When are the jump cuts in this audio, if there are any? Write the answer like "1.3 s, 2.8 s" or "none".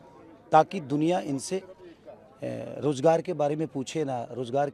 none